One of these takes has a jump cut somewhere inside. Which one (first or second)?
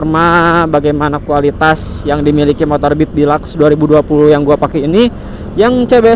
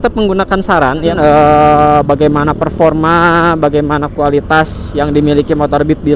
second